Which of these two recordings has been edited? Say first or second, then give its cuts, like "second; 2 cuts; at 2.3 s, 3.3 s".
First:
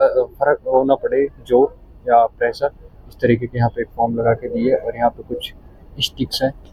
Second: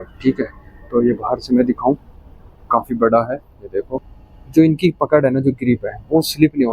second; 1 cut; at 3.9 s